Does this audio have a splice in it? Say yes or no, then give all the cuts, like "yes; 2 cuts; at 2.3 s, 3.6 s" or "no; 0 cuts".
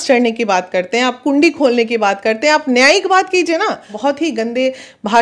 yes; 1 cut; at 3.9 s